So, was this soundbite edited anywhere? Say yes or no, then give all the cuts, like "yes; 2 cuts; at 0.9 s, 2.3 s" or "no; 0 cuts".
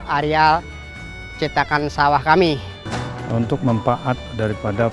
yes; 1 cut; at 2.7 s